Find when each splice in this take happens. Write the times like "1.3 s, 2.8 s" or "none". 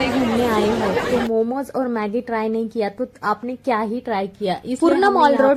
none